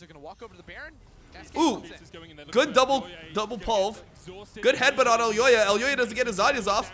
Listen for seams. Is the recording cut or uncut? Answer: uncut